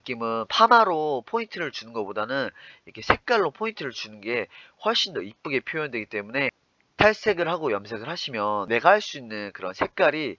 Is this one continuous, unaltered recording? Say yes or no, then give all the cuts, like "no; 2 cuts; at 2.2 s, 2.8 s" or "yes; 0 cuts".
no; 1 cut; at 8.6 s